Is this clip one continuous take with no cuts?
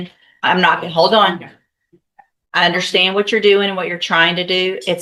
yes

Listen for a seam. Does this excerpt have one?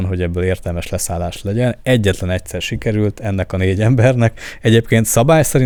no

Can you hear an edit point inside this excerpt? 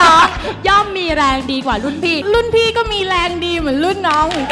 yes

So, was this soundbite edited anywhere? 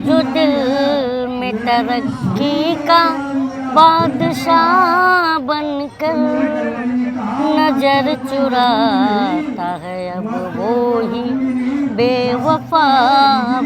no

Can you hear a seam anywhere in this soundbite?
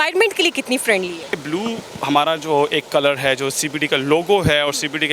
yes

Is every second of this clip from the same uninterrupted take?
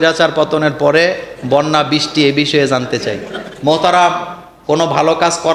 no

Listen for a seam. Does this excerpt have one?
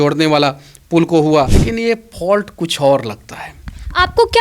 yes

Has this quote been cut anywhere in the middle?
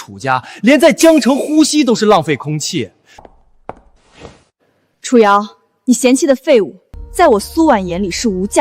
yes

